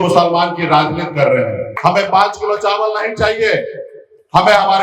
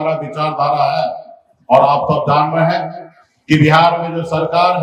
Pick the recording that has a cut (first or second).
first